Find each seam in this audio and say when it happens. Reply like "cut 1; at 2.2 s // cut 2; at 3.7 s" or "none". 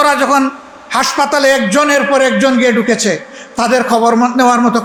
none